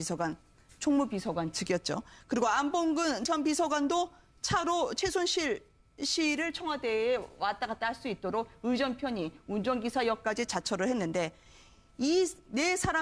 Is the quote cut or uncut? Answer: cut